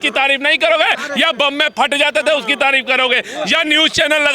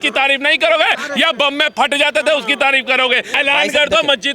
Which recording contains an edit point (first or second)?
second